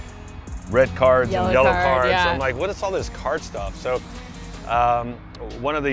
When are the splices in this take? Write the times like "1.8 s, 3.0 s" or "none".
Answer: none